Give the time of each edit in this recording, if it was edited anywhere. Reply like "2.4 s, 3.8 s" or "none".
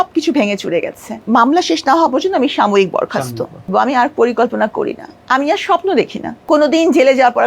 1.2 s, 3.7 s, 6.3 s